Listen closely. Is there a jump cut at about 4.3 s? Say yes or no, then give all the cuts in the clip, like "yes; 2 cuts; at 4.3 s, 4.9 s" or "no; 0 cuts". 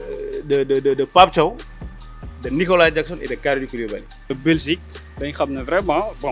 yes; 1 cut; at 4.3 s